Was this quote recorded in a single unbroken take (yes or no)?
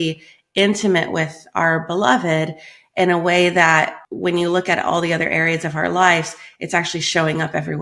no